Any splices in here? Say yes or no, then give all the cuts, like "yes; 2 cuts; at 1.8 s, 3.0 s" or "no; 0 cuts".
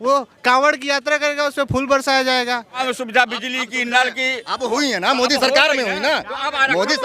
yes; 1 cut; at 2.8 s